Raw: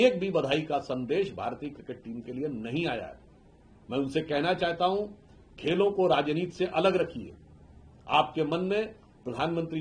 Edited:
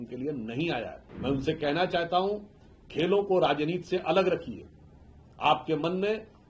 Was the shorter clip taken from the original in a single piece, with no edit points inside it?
no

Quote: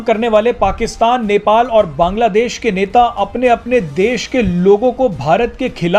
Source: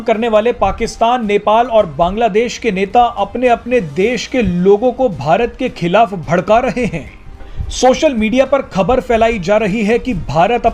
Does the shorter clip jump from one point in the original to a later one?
no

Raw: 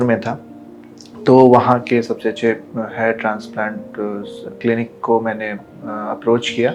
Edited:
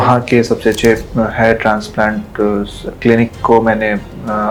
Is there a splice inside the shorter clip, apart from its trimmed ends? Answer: no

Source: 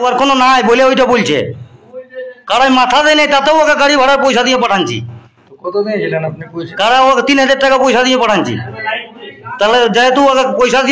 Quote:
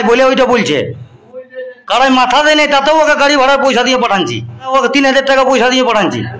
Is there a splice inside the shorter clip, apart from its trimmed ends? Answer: yes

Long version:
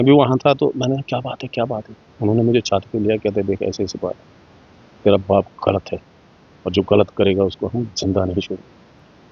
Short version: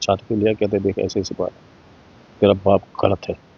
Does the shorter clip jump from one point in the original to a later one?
no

